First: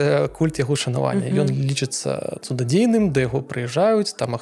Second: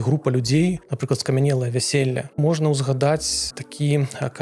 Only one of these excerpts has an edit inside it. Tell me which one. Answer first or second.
second